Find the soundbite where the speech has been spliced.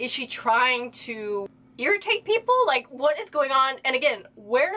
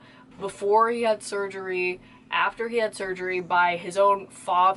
first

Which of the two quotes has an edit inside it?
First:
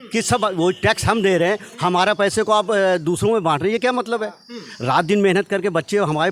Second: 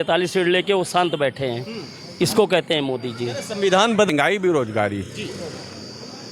second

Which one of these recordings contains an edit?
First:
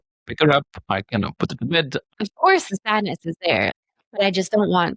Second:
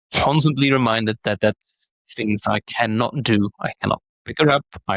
first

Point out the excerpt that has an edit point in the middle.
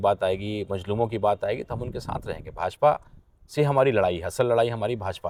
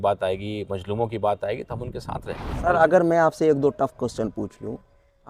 second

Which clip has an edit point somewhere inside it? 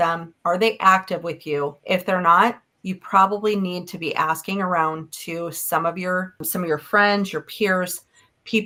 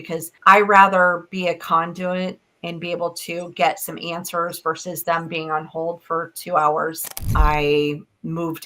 second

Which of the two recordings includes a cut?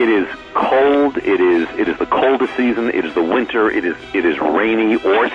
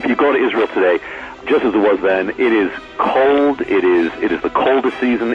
second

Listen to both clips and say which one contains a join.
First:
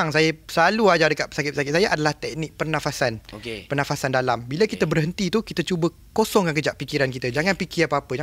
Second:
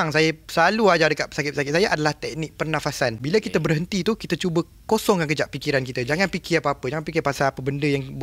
second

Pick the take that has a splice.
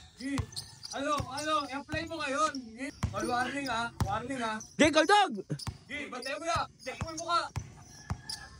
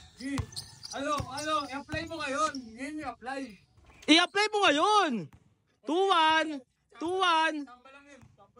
first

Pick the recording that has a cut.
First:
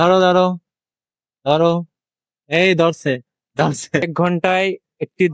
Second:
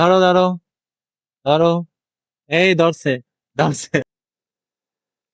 first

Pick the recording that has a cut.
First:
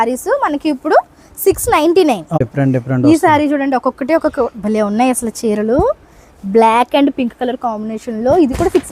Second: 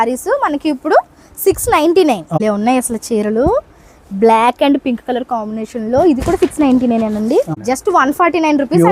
second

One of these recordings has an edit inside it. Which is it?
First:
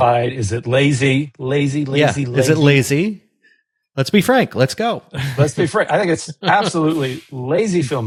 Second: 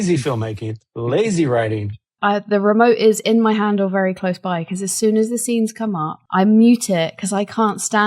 second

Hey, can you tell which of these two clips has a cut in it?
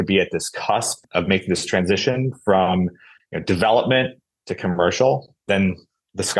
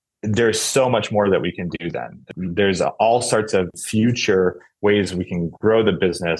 second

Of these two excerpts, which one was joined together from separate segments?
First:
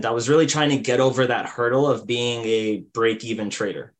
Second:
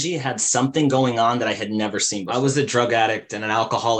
second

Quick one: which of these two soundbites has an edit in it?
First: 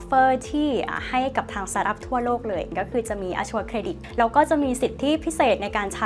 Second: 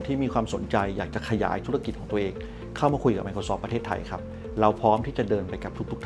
first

